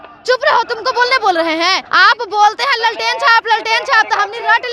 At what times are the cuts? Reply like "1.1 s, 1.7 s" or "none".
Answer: 1.9 s